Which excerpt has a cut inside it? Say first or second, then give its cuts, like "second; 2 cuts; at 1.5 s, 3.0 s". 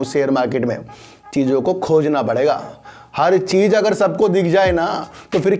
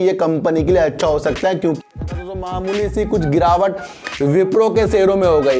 second; 1 cut; at 1.8 s